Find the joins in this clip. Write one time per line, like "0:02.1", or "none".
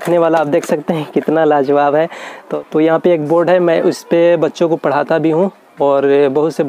0:02.6